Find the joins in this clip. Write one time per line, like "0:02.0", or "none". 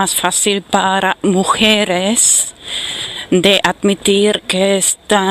0:02.4